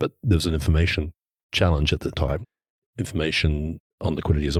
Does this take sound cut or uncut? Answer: uncut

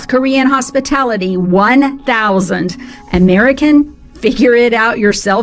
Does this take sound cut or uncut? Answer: uncut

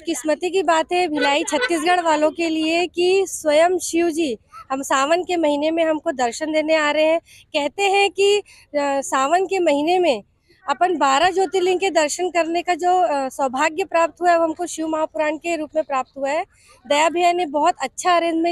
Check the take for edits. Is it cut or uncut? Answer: uncut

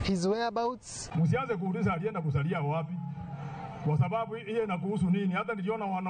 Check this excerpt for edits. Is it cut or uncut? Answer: cut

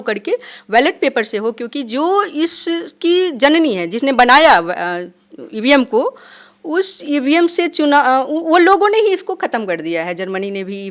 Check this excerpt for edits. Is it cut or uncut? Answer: uncut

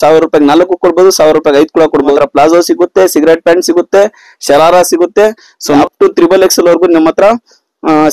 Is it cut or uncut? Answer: cut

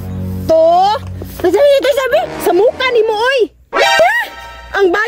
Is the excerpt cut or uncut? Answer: uncut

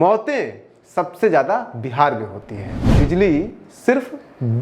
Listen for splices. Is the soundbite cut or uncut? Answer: cut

